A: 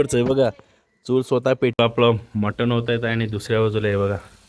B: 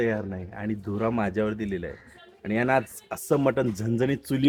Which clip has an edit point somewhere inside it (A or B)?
A